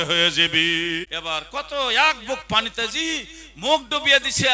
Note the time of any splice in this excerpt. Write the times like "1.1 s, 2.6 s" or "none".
1.1 s